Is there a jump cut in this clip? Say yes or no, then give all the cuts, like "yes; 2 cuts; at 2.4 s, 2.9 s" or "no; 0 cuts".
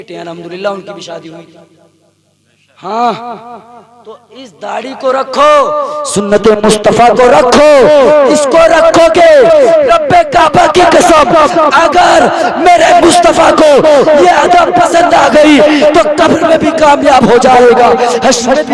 no; 0 cuts